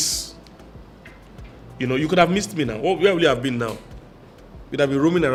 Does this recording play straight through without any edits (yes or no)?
yes